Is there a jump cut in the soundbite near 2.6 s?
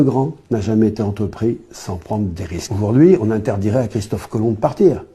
yes; 1 cut; at 2.6 s

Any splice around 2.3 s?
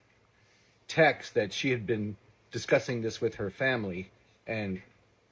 no; 0 cuts

